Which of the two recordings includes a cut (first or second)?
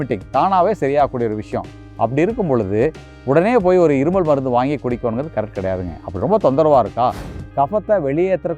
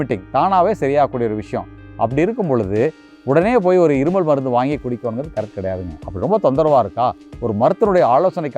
first